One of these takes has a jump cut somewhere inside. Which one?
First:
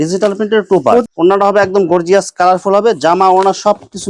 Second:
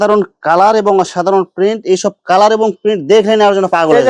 first; 1 cut; at 1.1 s

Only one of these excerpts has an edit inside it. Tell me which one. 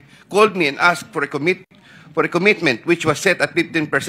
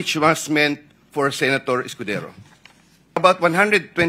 second; 1 cut; at 3.2 s

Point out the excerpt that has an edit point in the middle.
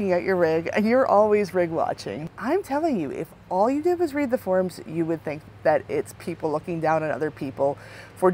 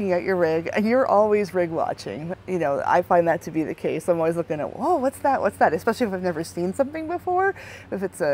first; 2 cuts; at 2.3 s, 5.4 s

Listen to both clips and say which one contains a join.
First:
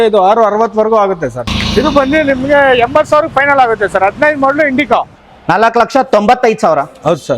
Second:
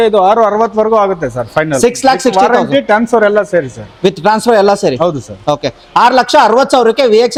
first; 2 cuts; at 1.4 s, 5.1 s

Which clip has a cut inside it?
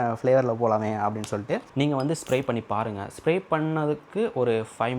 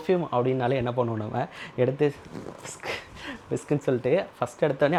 first; 1 cut; at 1.7 s

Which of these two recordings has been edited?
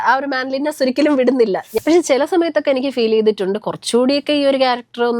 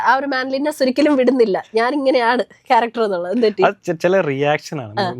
first; 1 cut; at 1.7 s

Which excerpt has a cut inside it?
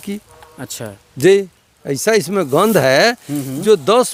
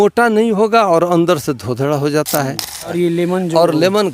second; 1 cut; at 2.9 s

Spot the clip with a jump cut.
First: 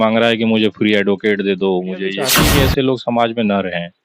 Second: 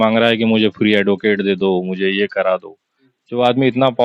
first; 1 cut; at 2.4 s

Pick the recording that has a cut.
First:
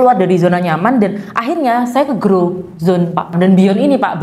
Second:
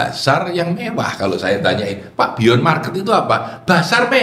first; 1 cut; at 3.2 s

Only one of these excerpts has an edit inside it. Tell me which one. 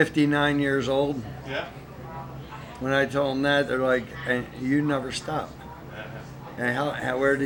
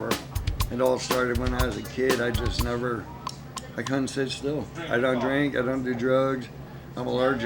second; 1 cut; at 4.8 s

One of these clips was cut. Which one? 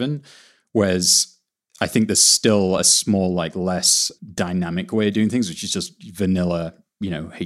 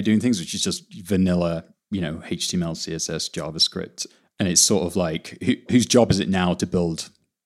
second; 2 cuts; at 4.0 s, 5.7 s

